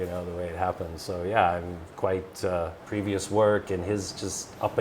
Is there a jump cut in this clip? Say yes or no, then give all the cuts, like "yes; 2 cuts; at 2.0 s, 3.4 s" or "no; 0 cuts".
yes; 1 cut; at 2.8 s